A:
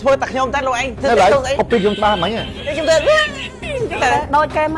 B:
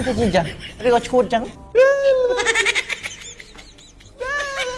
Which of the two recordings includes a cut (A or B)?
B